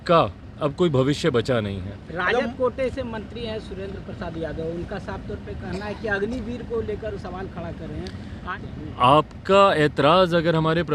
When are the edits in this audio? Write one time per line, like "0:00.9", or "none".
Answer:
none